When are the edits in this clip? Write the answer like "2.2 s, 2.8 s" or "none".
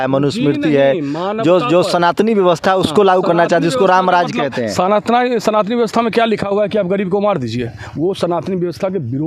none